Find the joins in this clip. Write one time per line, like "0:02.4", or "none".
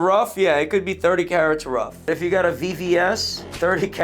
0:02.0

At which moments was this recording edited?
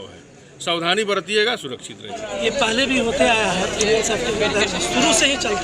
0:02.4

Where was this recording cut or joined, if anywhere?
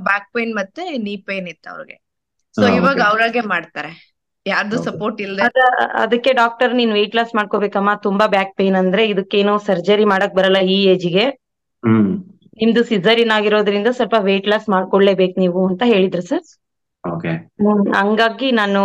0:05.4

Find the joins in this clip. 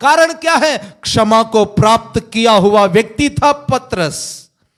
none

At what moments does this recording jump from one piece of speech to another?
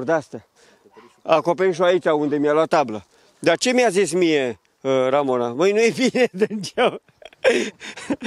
none

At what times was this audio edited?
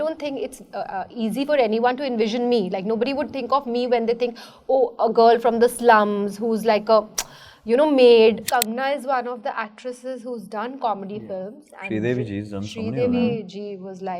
0:08.4

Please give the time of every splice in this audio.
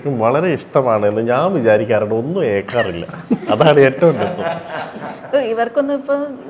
none

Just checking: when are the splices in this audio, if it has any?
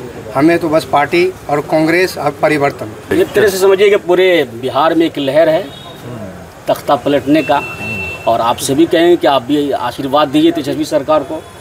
0:03.0

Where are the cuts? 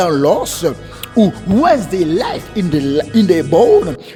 none

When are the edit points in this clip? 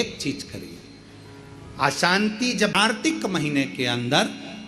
0:02.9

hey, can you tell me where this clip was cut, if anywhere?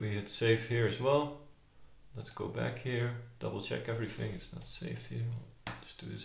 none

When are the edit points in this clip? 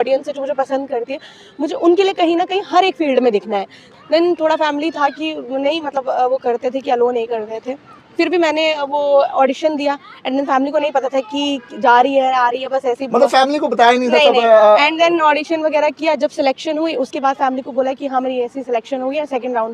0:03.8

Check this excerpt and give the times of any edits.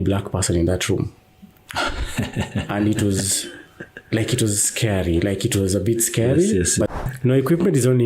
0:06.9

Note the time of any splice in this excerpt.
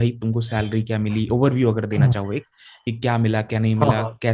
none

